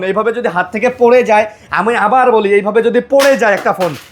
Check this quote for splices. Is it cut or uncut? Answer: uncut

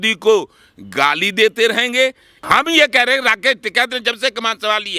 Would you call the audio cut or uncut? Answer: cut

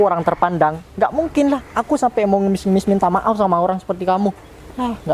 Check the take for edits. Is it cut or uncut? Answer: uncut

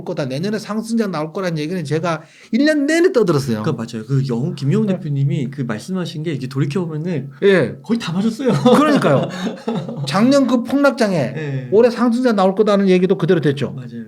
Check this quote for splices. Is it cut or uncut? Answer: uncut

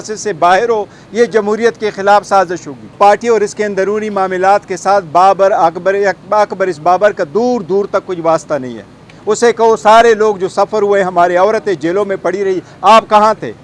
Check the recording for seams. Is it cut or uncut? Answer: cut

